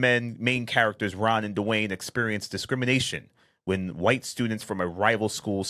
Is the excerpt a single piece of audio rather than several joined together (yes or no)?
yes